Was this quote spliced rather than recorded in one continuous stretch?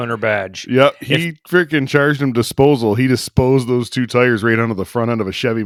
no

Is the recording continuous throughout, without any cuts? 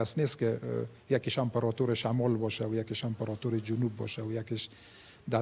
yes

